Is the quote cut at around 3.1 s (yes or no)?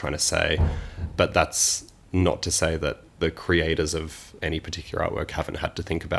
yes